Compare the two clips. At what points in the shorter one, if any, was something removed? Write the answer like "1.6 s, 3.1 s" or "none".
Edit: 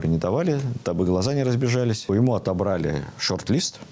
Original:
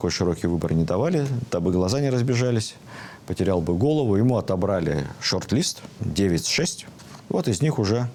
2.1 s